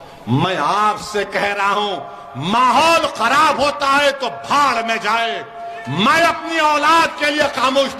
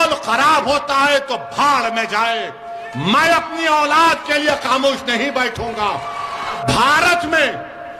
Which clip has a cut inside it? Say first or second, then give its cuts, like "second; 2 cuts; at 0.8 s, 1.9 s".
second; 1 cut; at 6.6 s